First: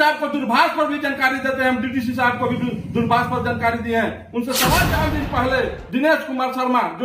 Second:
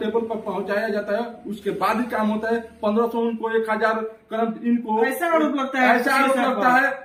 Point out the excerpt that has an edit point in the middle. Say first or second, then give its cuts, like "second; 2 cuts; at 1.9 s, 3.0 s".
first; 1 cut; at 5.0 s